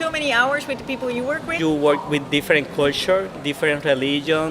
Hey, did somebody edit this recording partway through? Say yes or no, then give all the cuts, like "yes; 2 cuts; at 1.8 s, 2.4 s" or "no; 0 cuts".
yes; 1 cut; at 1.5 s